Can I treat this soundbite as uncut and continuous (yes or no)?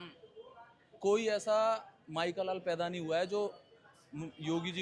yes